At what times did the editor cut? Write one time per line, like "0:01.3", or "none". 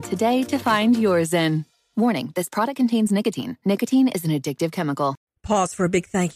0:05.2